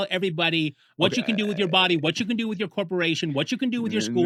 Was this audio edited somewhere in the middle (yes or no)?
no